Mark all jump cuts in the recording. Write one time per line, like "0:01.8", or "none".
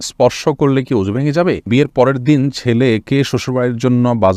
0:01.7

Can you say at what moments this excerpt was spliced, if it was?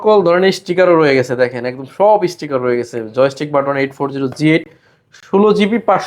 none

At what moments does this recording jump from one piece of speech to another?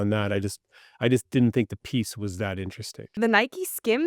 0:03.2

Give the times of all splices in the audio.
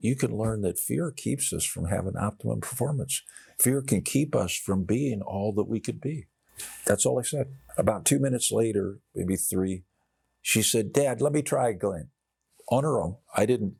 none

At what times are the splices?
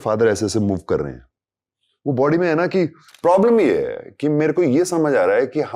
0:03.1

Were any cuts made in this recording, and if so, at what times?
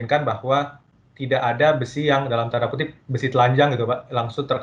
none

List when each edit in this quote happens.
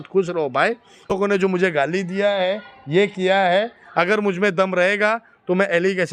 0:01.1

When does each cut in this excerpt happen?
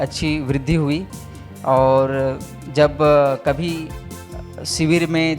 none

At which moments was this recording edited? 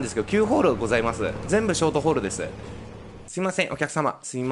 0:03.1

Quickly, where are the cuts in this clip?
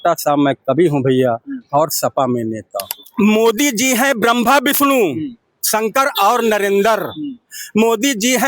0:02.9

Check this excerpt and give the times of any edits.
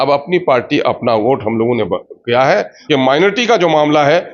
0:02.8

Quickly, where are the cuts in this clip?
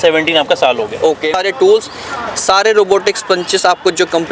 0:01.3

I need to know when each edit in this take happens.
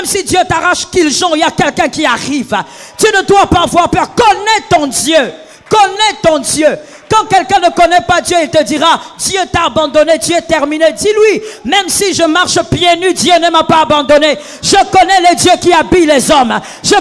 none

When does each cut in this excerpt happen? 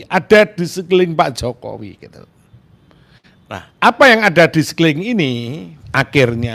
none

